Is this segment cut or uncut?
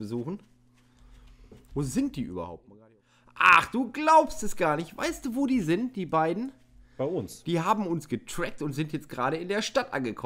cut